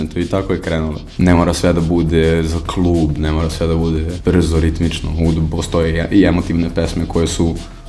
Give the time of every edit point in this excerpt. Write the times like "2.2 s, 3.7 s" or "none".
1.0 s, 4.1 s